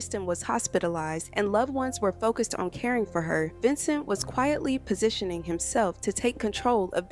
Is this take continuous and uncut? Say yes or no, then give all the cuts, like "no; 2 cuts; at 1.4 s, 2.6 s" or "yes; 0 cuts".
yes; 0 cuts